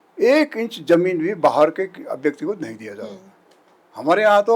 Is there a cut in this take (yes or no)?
no